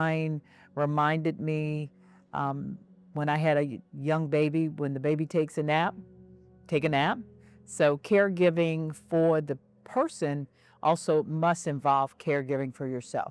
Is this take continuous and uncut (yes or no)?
yes